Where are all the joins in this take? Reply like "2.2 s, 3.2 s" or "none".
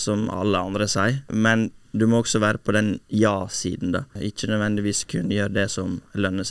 1.3 s, 4.1 s